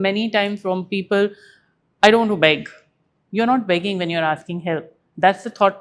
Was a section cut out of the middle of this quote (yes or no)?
no